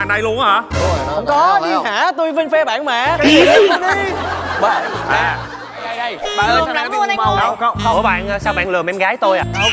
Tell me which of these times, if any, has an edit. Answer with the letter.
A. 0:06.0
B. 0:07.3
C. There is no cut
A